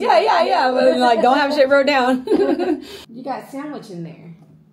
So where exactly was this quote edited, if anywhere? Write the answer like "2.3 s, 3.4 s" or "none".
3.0 s